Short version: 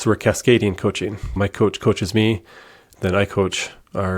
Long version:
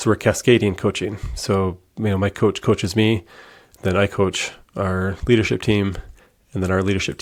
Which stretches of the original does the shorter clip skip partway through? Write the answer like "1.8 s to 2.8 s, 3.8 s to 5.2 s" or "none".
1.3 s to 2.2 s